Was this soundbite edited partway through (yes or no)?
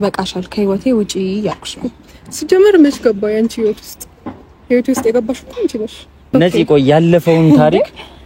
yes